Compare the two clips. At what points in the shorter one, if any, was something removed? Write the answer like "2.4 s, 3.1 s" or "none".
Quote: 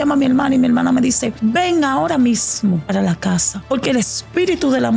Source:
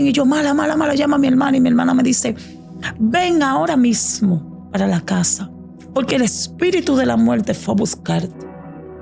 1.3 s, 2.8 s, 3.5 s